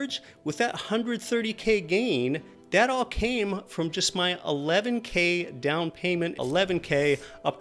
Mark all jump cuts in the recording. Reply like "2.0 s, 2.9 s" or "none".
6.4 s